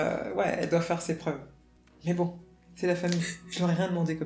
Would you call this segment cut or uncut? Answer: cut